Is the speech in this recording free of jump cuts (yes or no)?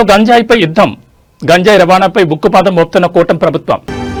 yes